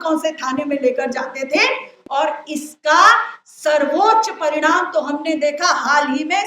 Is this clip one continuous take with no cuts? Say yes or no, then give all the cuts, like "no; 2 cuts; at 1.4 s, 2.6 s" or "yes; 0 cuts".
yes; 0 cuts